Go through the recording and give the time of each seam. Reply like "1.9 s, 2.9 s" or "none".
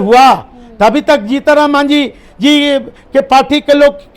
none

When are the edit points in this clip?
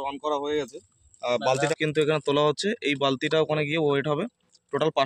1.7 s

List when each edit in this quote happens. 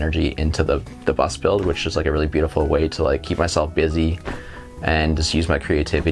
none

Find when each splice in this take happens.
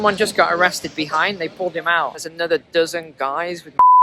1.9 s

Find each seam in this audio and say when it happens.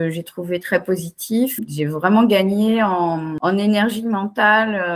1.6 s, 3.3 s

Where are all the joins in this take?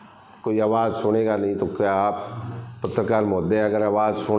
none

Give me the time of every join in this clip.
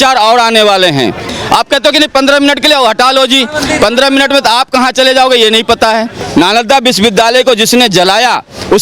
1.2 s, 6.2 s

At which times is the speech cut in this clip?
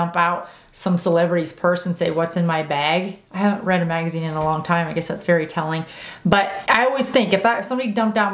6.6 s

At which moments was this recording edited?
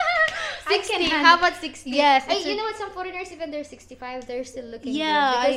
none

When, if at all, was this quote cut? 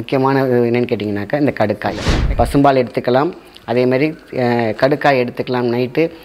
2.1 s

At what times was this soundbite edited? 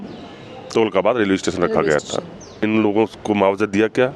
2.6 s

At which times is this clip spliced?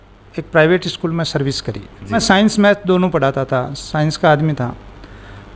2.2 s

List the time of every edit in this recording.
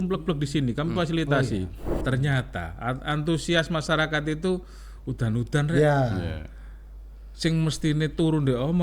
1.9 s

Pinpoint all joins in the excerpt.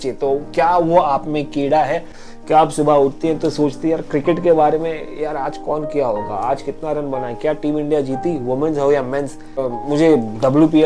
9.7 s

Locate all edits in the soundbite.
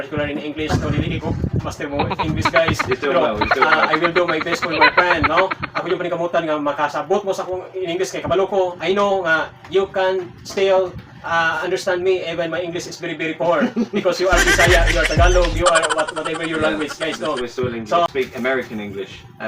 18.1 s

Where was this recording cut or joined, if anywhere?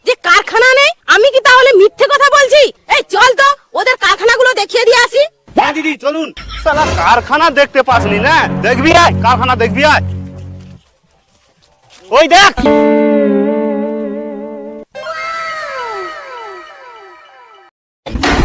6.4 s, 12.7 s

